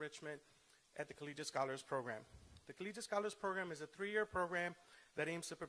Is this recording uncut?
no; 1 cut; at 3.4 s

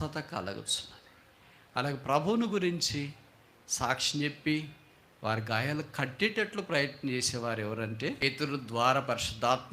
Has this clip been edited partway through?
yes; 1 cut; at 8.2 s

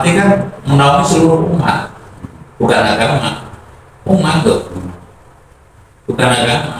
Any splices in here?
no; 0 cuts

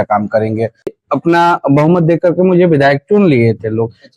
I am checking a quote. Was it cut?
yes; 1 cut; at 1.0 s

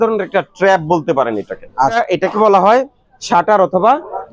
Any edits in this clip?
yes; 1 cut; at 2.0 s

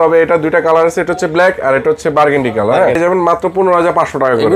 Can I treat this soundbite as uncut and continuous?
no; 1 cut; at 3.0 s

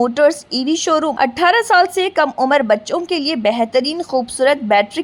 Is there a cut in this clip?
yes; 1 cut; at 1.1 s

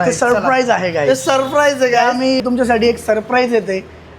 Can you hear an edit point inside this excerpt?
yes; 1 cut; at 2.4 s

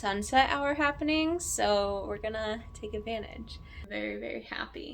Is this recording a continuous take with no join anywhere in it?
no; 1 cut; at 3.7 s

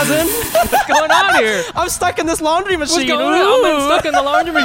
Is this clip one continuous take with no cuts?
yes; 0 cuts

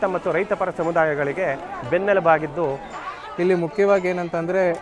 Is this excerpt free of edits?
no; 1 cut; at 3.0 s

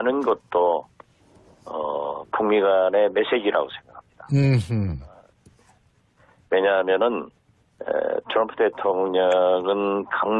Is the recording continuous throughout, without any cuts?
no; 1 cut; at 2.7 s

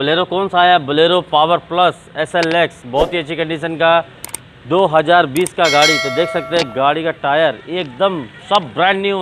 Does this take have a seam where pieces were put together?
no; 0 cuts

